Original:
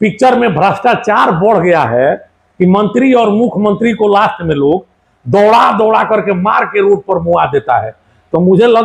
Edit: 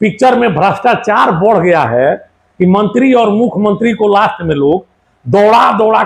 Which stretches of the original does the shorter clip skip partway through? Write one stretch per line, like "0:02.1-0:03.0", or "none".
none

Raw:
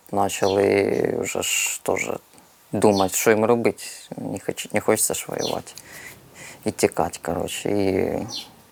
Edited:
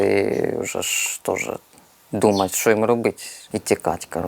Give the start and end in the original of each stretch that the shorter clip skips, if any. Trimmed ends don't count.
0:03.9-0:06.4

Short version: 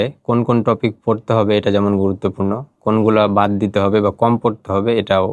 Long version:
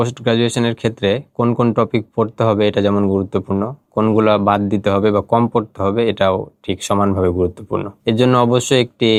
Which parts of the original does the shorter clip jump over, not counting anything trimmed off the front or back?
none

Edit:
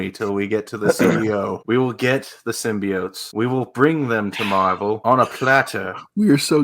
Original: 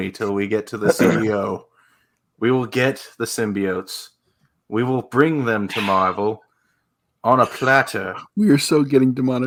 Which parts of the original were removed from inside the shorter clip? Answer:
0:01.6-0:02.3
0:03.9-0:04.6
0:06.4-0:07.2

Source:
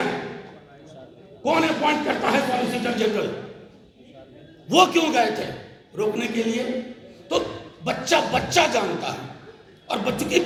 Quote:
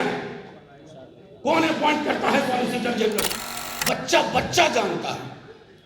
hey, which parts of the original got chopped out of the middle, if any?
0:03.7-0:07.7

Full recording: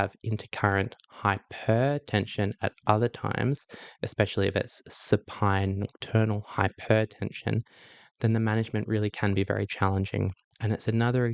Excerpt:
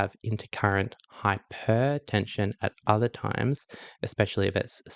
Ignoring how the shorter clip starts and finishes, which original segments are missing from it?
none

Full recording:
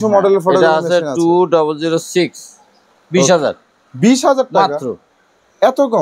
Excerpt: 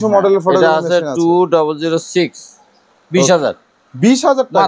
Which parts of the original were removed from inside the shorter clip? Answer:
none

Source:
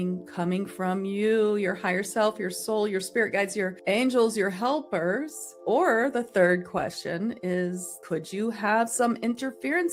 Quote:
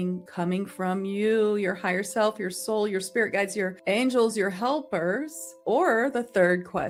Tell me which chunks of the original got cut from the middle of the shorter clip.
none

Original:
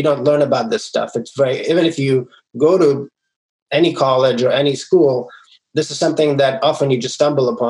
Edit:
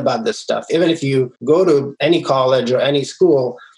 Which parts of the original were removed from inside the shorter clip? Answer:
0:01.5-0:02.1
0:03.0-0:03.6

